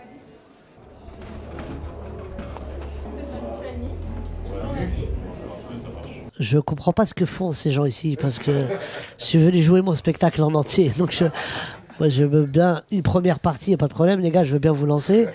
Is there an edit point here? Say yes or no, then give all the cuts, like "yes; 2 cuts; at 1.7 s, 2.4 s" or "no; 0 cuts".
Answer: yes; 1 cut; at 10.5 s